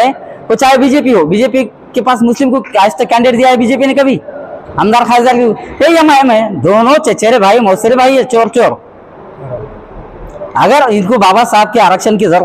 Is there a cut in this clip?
no; 0 cuts

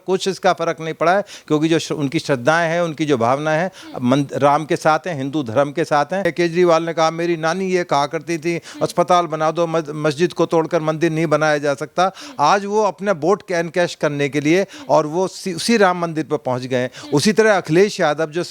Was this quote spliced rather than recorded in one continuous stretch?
yes; 1 cut; at 6.2 s

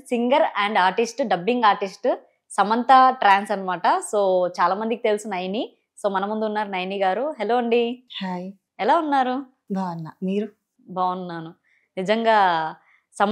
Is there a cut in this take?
no; 0 cuts

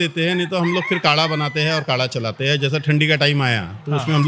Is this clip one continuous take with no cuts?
yes; 0 cuts

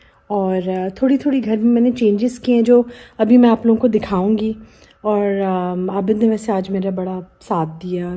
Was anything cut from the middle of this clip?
no; 0 cuts

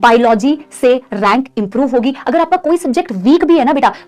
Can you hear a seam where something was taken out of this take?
no; 0 cuts

